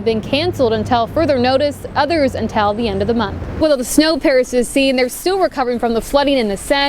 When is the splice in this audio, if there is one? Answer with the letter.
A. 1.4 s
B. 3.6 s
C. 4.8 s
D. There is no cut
B